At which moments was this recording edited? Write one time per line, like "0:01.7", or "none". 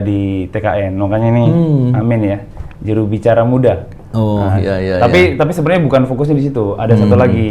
none